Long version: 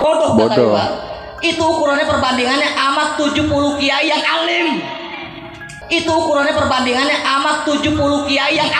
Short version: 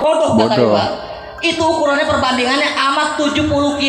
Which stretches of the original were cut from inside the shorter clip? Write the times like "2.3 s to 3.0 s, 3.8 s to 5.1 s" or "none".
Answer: none